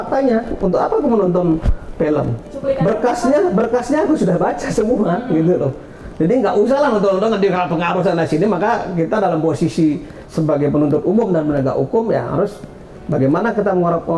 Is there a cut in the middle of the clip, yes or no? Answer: no